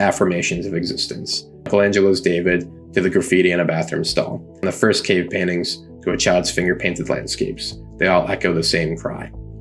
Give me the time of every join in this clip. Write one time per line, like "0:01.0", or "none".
0:04.6